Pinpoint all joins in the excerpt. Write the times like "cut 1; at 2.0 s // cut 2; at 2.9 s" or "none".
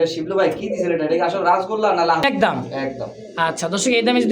cut 1; at 2.2 s